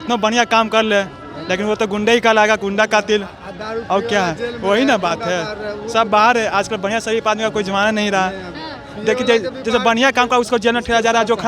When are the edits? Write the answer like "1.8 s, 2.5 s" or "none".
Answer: none